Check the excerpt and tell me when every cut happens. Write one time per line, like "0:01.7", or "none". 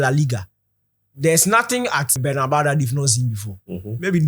0:02.2